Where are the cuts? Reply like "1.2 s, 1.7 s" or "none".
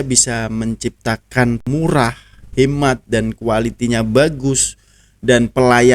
1.6 s